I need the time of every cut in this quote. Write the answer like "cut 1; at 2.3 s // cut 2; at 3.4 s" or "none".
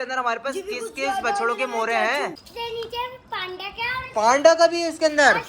cut 1; at 2.4 s